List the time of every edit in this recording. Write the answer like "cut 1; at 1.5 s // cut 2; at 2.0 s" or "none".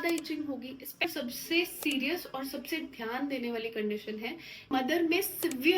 cut 1; at 1.0 s // cut 2; at 4.7 s